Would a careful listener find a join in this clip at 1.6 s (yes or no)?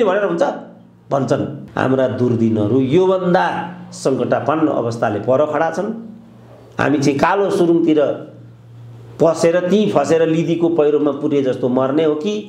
yes